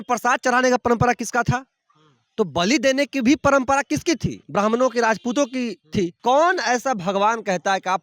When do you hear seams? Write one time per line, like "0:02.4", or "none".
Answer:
0:04.4
0:06.2